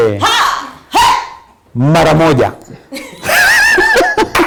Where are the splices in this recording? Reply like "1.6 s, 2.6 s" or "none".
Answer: none